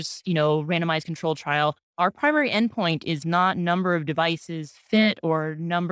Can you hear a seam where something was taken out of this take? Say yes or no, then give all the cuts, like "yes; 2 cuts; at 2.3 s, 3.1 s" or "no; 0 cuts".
no; 0 cuts